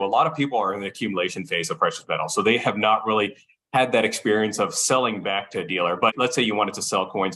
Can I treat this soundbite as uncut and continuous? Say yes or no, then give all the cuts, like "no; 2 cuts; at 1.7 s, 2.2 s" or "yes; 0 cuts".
no; 1 cut; at 6.1 s